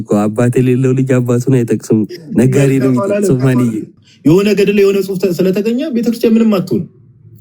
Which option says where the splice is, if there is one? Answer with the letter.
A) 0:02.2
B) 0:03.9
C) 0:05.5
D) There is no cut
B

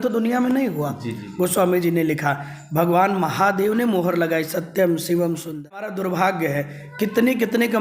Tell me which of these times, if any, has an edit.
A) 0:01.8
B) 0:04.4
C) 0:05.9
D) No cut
C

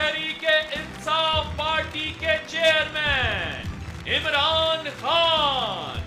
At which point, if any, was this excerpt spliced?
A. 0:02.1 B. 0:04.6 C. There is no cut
C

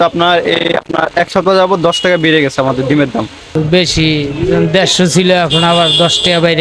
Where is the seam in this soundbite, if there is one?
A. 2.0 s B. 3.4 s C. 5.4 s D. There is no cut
B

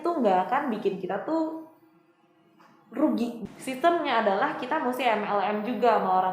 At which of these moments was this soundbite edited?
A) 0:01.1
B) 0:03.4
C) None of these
B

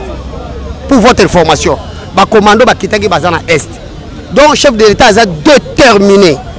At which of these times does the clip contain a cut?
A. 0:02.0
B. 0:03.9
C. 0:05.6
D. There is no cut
D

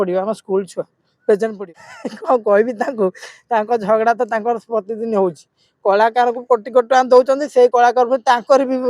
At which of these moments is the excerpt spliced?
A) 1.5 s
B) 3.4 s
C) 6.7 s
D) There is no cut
A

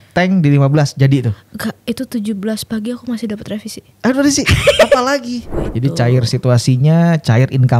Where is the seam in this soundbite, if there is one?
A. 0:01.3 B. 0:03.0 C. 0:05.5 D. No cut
C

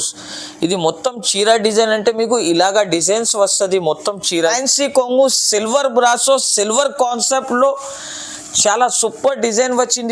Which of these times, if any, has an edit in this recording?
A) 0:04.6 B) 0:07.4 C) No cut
A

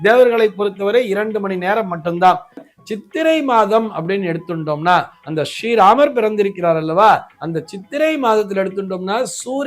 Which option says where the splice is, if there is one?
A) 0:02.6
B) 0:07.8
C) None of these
A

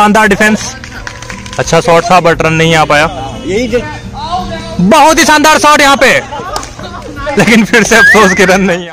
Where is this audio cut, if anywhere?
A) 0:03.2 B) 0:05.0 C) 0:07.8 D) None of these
D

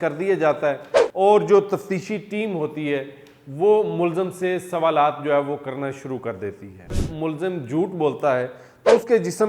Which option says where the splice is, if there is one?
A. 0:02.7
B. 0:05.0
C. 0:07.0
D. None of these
C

